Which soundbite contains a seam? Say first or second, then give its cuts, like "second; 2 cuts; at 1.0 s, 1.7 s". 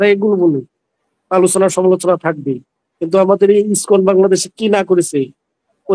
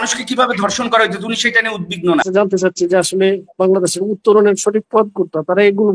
second; 1 cut; at 2.3 s